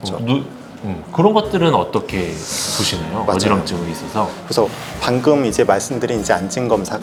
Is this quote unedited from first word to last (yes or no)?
yes